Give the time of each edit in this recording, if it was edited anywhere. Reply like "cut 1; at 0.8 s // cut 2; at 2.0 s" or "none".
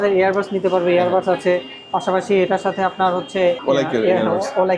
cut 1; at 3.6 s